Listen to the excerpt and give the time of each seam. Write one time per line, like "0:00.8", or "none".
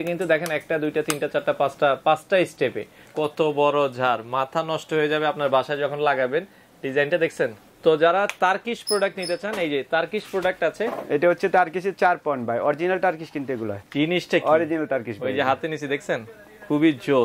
0:03.1
0:07.6
0:13.8